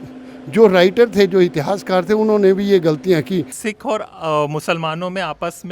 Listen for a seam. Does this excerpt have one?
yes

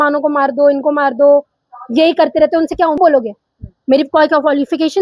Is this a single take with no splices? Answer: no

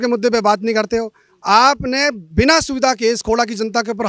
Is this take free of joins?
yes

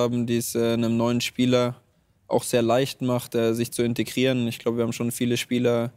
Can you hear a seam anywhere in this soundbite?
no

